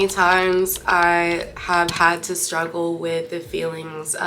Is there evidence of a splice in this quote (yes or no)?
no